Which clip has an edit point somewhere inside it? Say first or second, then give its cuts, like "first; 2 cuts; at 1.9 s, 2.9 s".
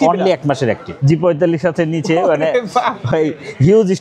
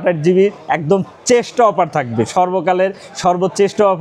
first; 1 cut; at 0.9 s